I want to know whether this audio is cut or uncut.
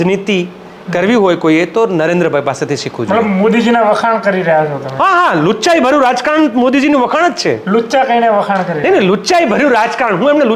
uncut